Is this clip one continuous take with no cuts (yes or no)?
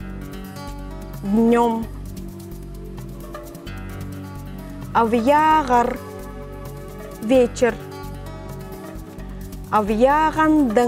yes